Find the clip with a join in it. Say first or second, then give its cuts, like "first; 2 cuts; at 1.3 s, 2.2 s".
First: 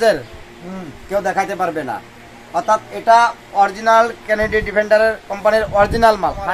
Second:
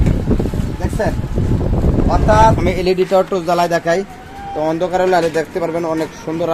second; 1 cut; at 2.6 s